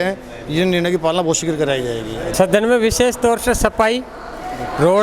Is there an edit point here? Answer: yes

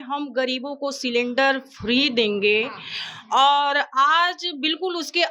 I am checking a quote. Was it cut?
no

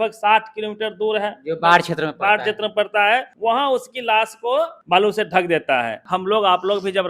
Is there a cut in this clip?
yes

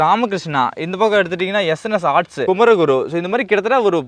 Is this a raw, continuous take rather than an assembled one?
no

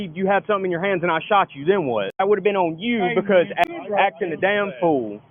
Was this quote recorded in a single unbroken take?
no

